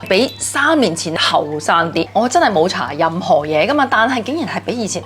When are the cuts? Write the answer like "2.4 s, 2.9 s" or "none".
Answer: 1.2 s, 2.1 s